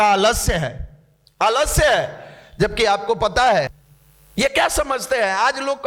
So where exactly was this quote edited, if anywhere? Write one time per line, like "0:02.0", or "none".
0:03.8